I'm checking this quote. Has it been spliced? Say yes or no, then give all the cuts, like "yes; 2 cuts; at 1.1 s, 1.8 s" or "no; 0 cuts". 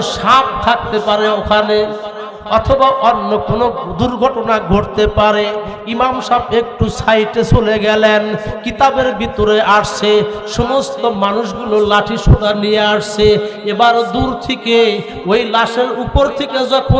no; 0 cuts